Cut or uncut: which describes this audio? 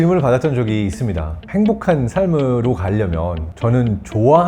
uncut